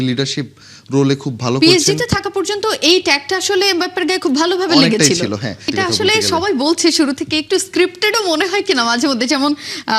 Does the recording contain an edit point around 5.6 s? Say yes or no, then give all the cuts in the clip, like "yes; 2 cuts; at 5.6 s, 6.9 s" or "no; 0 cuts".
yes; 1 cut; at 5.6 s